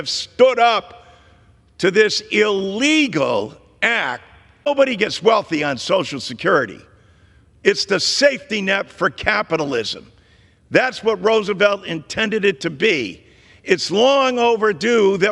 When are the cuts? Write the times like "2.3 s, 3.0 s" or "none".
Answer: 4.7 s